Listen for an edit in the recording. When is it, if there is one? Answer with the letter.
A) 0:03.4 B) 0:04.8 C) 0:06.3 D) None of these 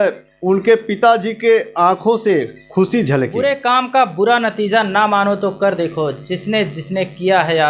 A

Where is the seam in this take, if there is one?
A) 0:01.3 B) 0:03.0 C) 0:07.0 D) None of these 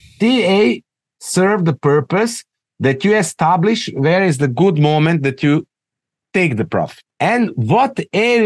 C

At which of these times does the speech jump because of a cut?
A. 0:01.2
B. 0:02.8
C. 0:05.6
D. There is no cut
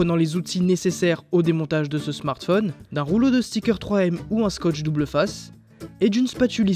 B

